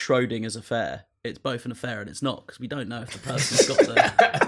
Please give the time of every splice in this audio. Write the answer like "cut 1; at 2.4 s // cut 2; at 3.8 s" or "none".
none

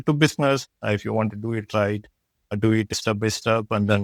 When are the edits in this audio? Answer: none

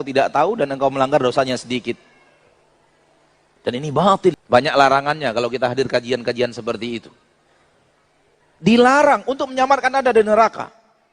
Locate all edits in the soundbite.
cut 1; at 4.1 s

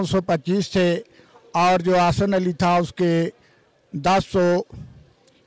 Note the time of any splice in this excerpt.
none

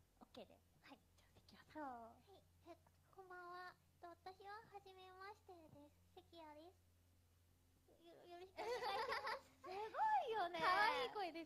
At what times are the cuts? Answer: cut 1; at 10.5 s

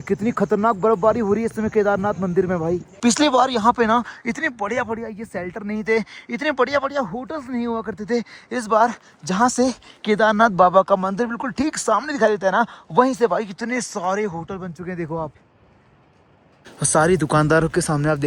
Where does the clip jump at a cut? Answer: none

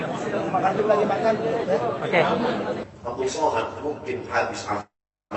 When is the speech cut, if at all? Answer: cut 1; at 2.8 s

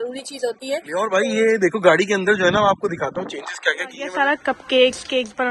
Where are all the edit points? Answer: cut 1; at 1.1 s // cut 2; at 4.1 s

